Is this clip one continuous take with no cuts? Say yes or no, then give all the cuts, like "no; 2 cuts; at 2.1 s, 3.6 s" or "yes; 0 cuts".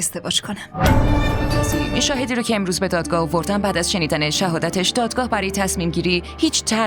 no; 1 cut; at 1.9 s